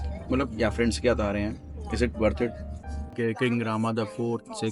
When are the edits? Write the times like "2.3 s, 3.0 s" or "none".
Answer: 3.1 s